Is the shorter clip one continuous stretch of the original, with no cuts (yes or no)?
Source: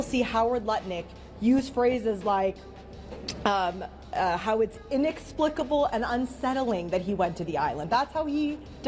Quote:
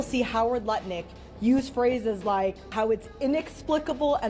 no